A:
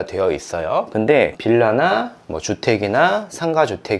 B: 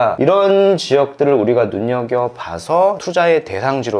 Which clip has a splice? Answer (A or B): A